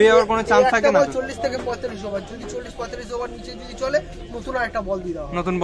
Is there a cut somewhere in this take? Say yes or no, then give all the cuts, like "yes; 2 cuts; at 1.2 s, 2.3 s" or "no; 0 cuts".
no; 0 cuts